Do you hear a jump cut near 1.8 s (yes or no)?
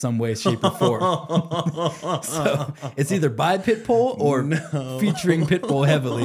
no